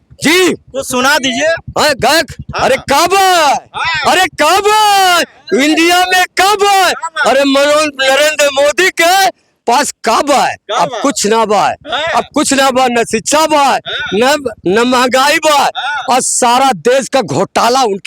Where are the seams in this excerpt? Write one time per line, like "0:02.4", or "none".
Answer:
none